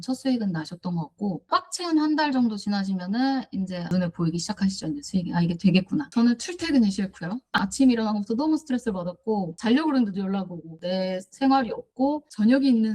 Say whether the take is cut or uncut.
cut